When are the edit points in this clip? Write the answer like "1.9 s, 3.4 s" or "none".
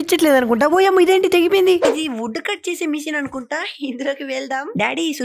1.9 s